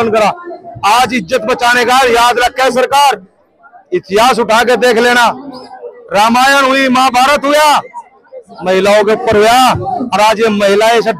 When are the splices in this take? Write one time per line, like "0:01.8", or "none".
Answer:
none